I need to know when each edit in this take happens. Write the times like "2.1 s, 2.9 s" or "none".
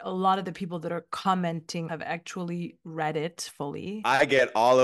1.9 s, 3.9 s